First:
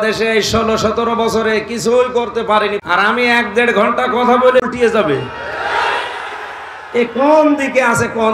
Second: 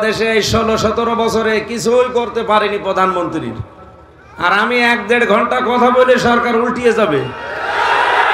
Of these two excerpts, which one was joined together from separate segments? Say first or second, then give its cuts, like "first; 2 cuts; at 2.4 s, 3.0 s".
first; 2 cuts; at 2.8 s, 4.6 s